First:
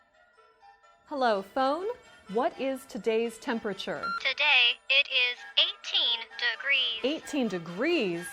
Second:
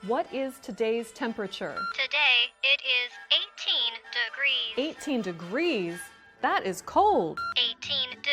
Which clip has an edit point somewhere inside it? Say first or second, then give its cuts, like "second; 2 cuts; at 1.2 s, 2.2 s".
first; 1 cut; at 1.0 s